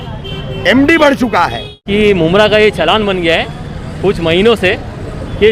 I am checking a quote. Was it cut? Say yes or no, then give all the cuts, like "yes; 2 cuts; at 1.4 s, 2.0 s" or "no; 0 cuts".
yes; 1 cut; at 1.8 s